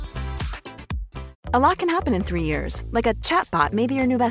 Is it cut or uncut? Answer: cut